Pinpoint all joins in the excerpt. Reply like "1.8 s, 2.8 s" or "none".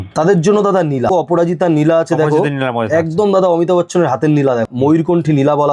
1.1 s, 4.7 s